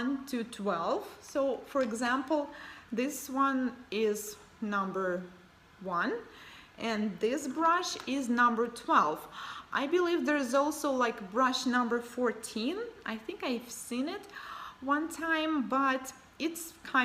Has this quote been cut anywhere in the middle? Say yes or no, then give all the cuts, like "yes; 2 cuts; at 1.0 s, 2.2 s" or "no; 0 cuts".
yes; 1 cut; at 12.7 s